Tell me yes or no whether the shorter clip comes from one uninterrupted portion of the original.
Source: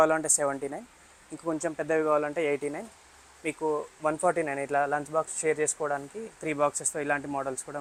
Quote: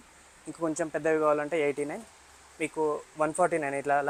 yes